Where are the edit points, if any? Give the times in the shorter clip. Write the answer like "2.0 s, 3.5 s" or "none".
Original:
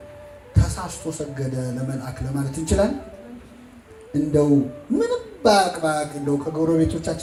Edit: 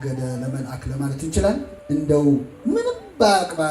1.7 s